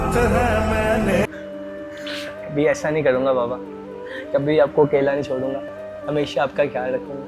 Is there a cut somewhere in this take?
no; 0 cuts

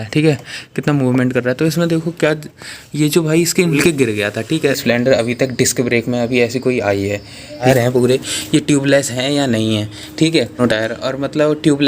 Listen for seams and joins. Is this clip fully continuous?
no; 4 cuts; at 3.8 s, 4.8 s, 7.6 s, 10.6 s

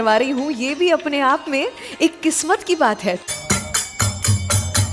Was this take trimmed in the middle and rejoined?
yes; 1 cut; at 3.4 s

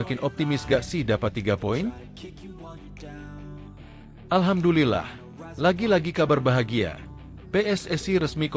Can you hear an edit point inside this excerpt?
yes; 2 cuts; at 2.3 s, 4.2 s

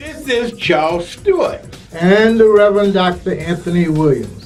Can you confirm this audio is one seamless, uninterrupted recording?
yes; 0 cuts

